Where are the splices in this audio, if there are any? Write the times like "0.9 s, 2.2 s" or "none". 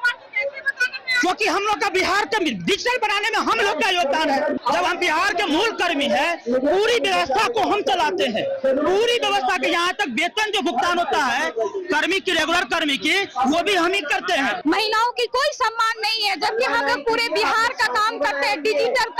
4.5 s, 14.6 s